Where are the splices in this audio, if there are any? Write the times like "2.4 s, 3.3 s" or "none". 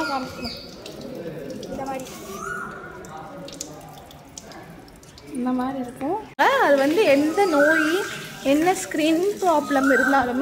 6.3 s